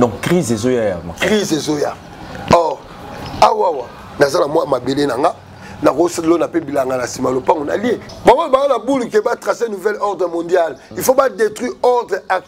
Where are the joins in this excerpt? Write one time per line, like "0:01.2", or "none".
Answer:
0:08.1